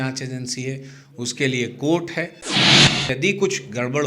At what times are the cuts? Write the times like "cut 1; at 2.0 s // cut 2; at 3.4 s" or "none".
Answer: cut 1; at 2.7 s